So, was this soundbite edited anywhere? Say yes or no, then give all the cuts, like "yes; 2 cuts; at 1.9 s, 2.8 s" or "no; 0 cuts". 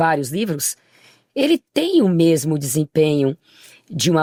no; 0 cuts